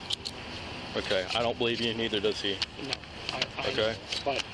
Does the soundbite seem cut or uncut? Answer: uncut